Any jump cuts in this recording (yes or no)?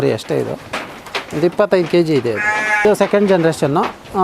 yes